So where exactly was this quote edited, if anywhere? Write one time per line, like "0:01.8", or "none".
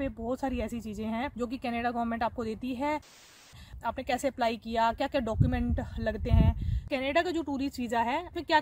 0:01.3
0:03.3
0:06.8